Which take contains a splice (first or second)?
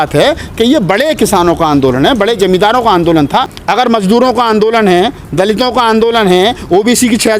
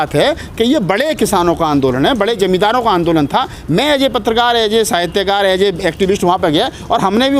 first